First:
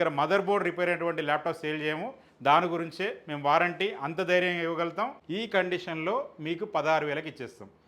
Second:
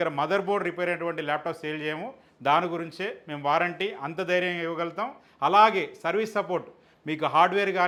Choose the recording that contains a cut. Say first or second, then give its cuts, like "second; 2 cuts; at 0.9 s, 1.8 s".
first; 1 cut; at 5.2 s